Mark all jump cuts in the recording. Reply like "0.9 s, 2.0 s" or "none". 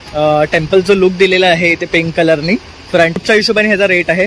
3.2 s